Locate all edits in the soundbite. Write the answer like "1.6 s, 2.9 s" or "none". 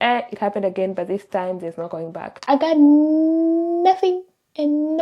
2.4 s